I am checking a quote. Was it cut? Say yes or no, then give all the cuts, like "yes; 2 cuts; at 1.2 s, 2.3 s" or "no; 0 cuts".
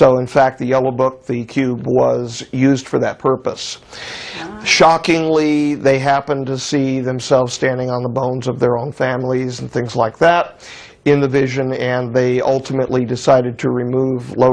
no; 0 cuts